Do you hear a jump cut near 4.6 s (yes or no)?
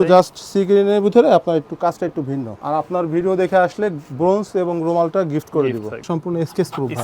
no